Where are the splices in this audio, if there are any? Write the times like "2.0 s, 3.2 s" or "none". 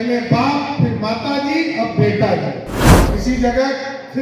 3.1 s

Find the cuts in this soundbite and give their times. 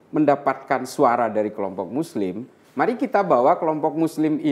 none

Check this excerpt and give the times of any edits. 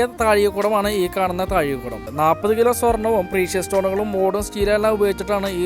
2.0 s

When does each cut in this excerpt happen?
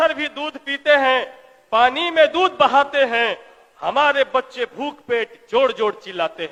none

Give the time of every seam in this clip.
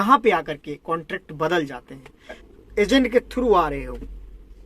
2.4 s

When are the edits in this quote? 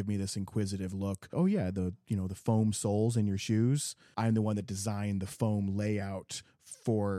1.3 s, 4.0 s

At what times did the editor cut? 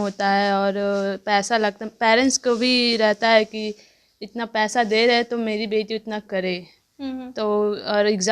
none

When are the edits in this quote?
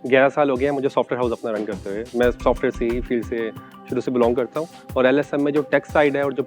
none

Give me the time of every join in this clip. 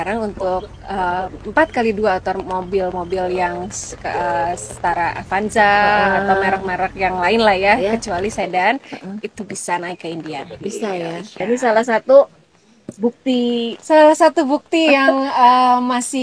11.4 s

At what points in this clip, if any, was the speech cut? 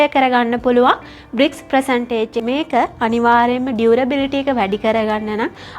2.4 s

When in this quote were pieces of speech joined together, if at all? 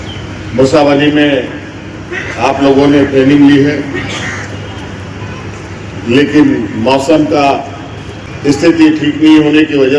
none

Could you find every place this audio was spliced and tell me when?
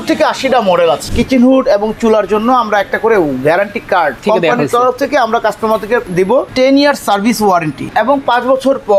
1.1 s, 4.2 s, 6.1 s, 7.9 s

